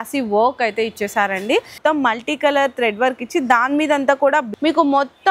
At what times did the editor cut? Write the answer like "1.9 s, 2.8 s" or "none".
1.7 s, 4.5 s